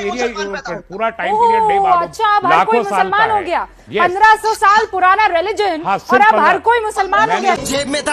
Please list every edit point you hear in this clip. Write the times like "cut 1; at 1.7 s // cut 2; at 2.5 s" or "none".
none